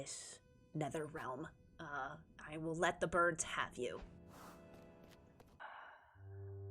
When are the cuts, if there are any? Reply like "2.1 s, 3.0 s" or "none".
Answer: 5.6 s